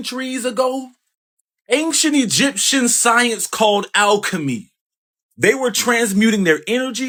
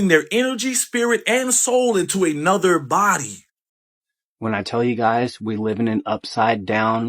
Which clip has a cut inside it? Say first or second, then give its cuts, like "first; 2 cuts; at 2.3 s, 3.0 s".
second; 1 cut; at 4.1 s